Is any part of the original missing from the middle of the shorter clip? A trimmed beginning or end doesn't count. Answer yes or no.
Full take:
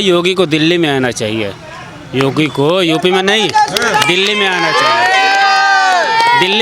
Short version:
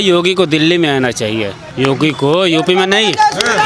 yes